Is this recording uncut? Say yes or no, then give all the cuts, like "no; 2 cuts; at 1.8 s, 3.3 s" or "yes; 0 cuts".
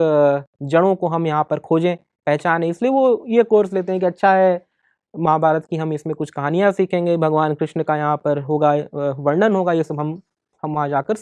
yes; 0 cuts